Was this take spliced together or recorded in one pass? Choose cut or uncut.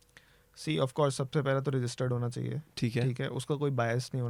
uncut